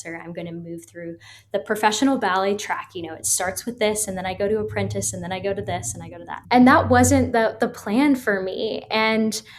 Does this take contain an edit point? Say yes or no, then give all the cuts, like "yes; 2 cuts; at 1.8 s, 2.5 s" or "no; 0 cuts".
yes; 1 cut; at 6.3 s